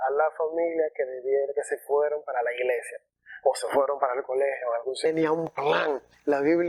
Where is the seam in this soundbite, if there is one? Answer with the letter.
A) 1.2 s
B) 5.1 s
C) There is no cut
B